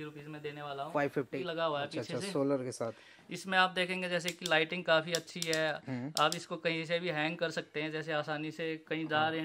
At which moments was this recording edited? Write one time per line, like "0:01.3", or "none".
0:01.3